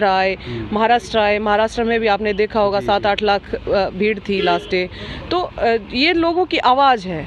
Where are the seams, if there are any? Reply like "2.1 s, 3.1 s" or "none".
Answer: none

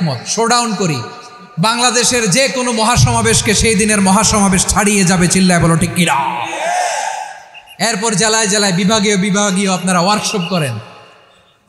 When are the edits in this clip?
none

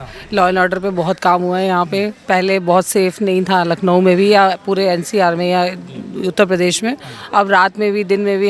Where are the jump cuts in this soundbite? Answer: none

